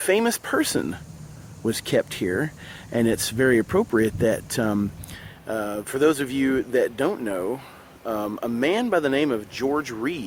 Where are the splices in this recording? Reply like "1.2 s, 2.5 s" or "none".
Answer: none